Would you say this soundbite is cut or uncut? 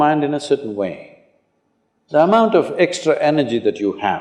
uncut